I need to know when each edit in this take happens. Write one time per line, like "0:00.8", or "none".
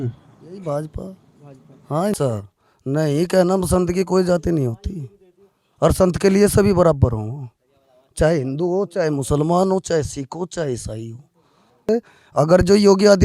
0:02.1
0:11.9